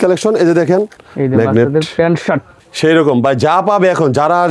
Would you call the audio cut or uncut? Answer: cut